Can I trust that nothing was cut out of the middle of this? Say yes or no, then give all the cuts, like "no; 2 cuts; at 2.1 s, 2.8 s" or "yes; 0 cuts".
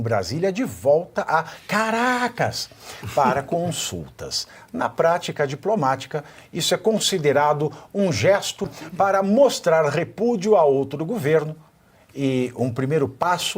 no; 1 cut; at 8.8 s